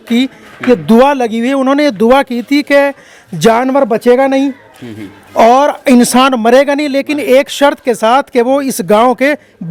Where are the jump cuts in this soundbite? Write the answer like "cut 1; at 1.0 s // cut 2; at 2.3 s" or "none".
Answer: none